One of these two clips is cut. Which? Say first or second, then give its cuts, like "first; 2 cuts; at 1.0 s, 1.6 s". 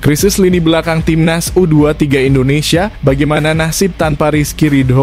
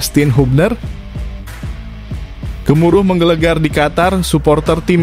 second; 2 cuts; at 0.8 s, 2.6 s